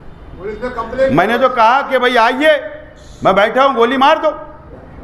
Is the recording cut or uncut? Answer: uncut